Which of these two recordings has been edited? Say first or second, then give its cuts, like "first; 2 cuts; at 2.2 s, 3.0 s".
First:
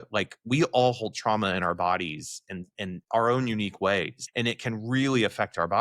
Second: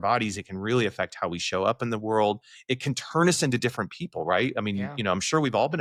first; 2 cuts; at 3.0 s, 4.2 s